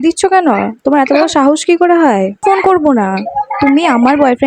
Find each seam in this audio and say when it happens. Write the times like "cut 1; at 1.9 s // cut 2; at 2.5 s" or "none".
cut 1; at 2.4 s